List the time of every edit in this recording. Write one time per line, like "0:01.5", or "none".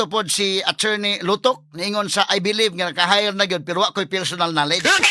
none